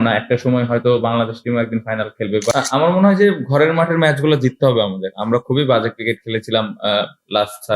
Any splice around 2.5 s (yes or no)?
yes